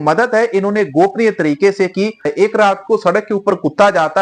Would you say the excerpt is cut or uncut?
cut